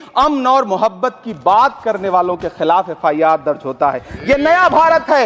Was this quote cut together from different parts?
no; 0 cuts

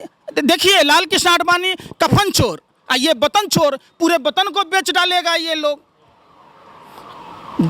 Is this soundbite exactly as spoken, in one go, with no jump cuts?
yes; 0 cuts

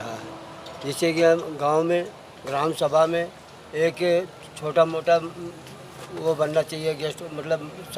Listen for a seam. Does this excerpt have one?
no; 0 cuts

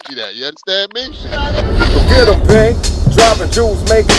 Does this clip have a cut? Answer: yes; 1 cut; at 1.2 s

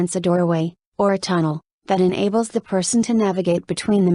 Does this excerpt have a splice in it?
no; 0 cuts

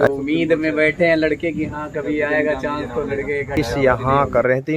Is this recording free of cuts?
no; 1 cut; at 3.5 s

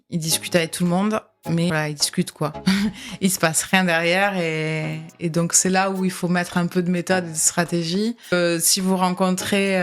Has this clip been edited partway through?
yes; 2 cuts; at 1.7 s, 8.3 s

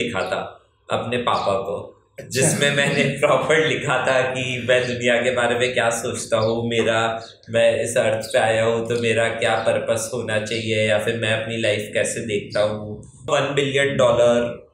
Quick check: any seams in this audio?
yes; 1 cut; at 13.3 s

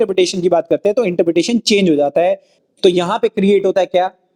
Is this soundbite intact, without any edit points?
no; 1 cut; at 2.5 s

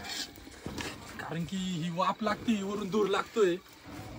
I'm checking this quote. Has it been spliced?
no; 0 cuts

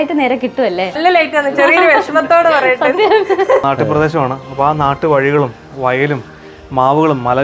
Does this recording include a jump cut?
yes; 2 cuts; at 1.0 s, 3.6 s

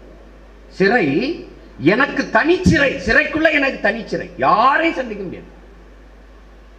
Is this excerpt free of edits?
yes; 0 cuts

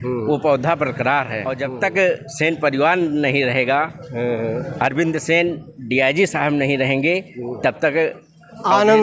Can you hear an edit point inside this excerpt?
yes; 1 cut; at 1.6 s

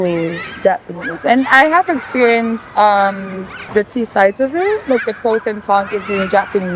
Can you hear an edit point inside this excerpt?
no; 0 cuts

